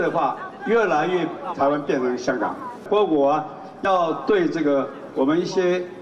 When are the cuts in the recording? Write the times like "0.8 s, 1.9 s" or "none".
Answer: 2.8 s